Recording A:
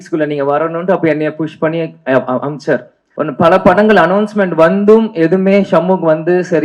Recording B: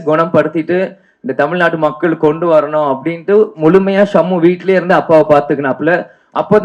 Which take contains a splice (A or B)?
A